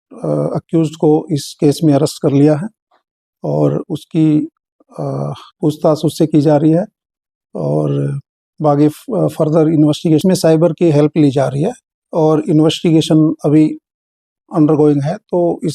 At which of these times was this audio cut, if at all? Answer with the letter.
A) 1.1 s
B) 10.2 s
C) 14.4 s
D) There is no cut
B